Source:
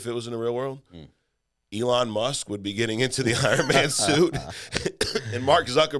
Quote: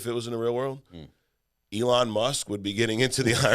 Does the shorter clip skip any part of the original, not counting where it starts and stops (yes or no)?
no